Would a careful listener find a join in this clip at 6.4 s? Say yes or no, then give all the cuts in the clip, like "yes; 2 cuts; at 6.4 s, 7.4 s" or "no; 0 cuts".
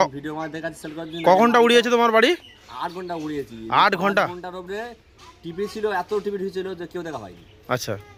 no; 0 cuts